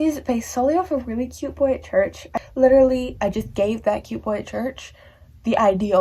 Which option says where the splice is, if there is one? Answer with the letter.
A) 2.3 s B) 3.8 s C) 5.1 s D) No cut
A